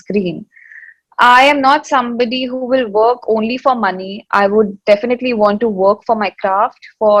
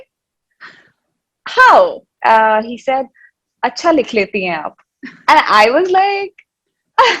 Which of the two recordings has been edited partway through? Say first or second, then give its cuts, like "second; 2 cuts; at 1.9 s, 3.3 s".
second; 1 cut; at 2.1 s